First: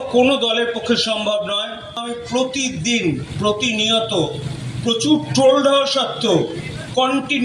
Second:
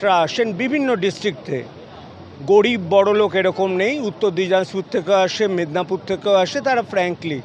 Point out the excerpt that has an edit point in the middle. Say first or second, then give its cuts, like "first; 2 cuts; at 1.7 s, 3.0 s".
first; 1 cut; at 2.0 s